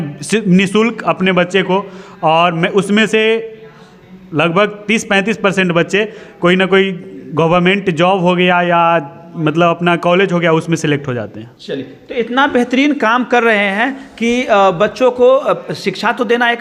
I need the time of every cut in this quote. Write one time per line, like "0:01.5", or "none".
none